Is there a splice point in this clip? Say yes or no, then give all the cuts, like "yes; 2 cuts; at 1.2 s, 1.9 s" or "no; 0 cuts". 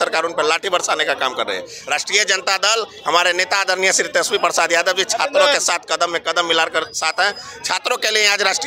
no; 0 cuts